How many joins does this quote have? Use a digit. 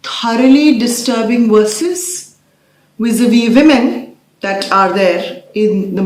0